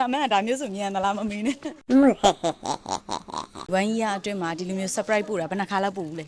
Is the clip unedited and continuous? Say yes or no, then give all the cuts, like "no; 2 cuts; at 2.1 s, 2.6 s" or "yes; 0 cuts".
no; 1 cut; at 3.7 s